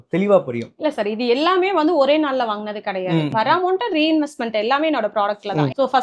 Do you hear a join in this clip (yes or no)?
no